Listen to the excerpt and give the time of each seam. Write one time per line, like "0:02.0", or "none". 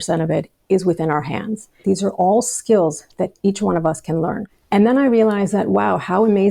0:01.8
0:04.4